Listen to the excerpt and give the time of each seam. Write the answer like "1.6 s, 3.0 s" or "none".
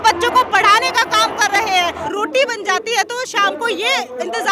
2.0 s